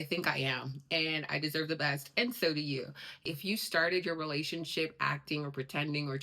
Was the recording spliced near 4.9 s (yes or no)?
no